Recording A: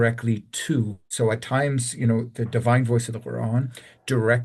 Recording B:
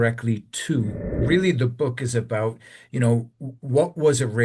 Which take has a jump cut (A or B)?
B